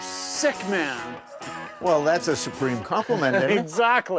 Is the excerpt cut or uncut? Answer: uncut